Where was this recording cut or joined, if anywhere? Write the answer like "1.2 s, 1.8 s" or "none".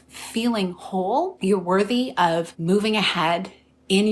1.3 s, 2.5 s